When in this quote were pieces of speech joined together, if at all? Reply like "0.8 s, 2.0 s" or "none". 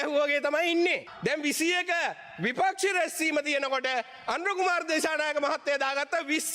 1.1 s

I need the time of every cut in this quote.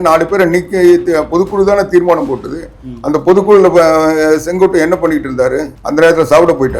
5.8 s

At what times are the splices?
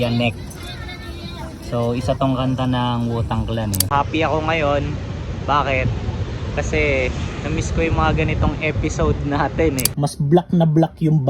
3.9 s, 9.9 s

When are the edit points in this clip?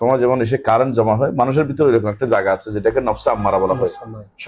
none

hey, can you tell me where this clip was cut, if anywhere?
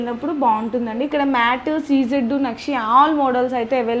1.1 s

